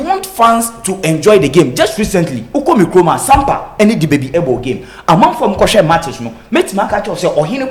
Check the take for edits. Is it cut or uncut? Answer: uncut